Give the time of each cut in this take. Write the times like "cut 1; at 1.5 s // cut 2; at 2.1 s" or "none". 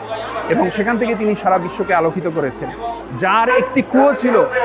cut 1; at 3.0 s